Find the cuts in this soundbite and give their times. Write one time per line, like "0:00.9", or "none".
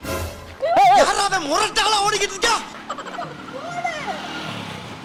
none